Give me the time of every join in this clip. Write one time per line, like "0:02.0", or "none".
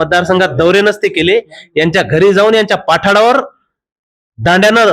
none